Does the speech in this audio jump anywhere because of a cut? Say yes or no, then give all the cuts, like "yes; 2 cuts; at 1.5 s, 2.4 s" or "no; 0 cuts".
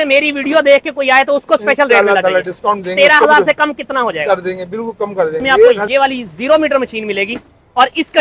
yes; 1 cut; at 5.8 s